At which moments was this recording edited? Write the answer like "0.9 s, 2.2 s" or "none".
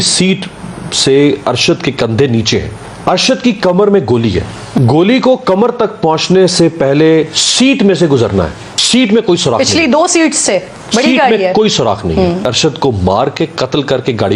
2.7 s, 4.6 s, 8.7 s, 12.5 s

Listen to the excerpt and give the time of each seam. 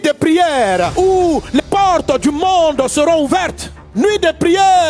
1.6 s

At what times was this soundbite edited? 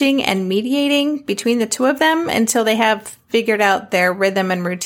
none

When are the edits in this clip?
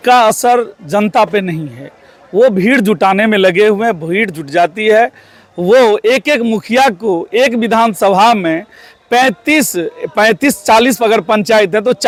none

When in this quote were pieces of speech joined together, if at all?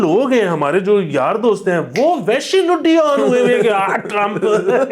none

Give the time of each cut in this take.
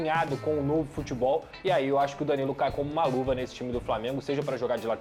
none

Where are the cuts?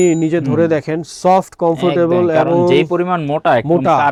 none

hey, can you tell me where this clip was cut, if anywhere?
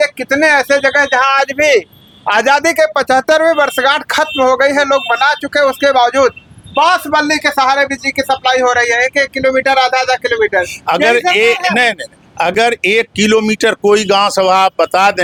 none

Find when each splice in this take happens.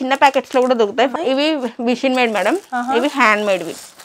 1.1 s

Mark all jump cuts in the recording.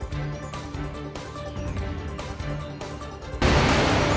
none

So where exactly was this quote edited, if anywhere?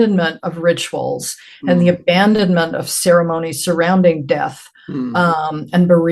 none

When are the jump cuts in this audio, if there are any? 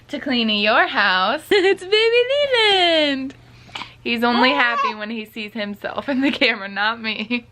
1.5 s

